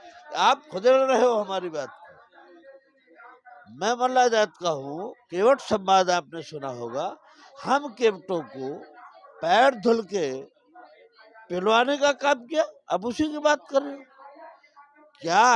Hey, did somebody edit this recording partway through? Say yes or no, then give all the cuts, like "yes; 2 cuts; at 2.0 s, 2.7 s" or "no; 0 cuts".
no; 0 cuts